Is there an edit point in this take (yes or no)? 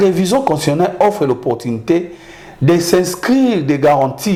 no